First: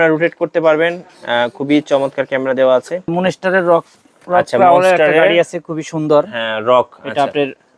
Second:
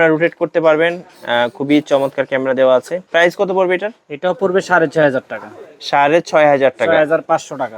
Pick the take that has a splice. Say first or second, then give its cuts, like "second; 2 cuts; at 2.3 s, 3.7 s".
first; 1 cut; at 3.1 s